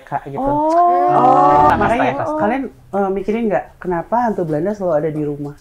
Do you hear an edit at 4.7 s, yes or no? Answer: no